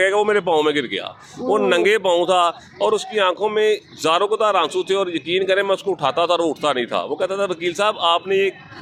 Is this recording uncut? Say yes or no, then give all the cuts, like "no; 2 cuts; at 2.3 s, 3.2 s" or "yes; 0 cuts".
yes; 0 cuts